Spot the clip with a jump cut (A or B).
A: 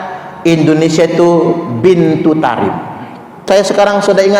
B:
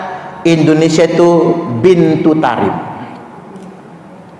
A